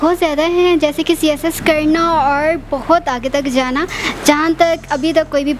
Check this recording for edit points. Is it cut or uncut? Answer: uncut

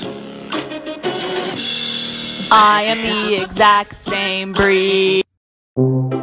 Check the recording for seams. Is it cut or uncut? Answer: uncut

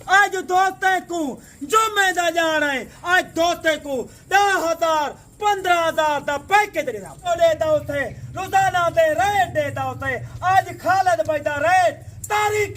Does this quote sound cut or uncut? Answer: cut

